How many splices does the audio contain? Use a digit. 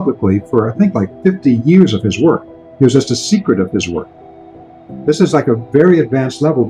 1